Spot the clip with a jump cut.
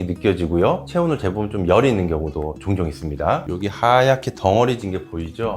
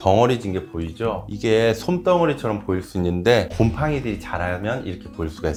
first; 1 cut; at 3.4 s

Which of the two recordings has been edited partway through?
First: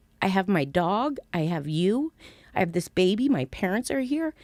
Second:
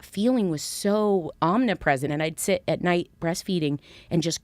second; 2 cuts; at 1.3 s, 2.1 s

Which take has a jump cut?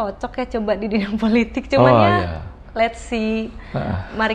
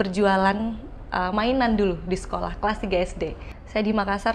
second; 1 cut; at 3.4 s

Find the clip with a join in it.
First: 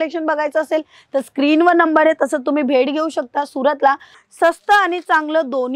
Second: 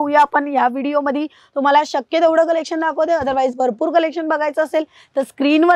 first; 1 cut; at 4.1 s

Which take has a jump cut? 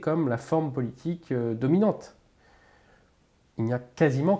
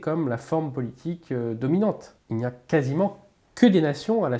second; 1 cut; at 2.1 s

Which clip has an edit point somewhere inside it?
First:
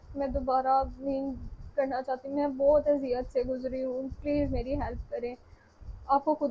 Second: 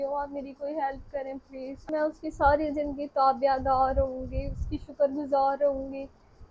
second; 1 cut; at 1.9 s

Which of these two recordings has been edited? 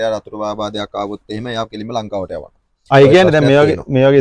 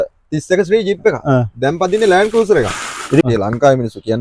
second; 1 cut; at 3.2 s

